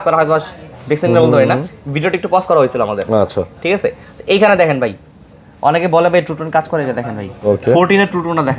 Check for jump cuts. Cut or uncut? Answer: uncut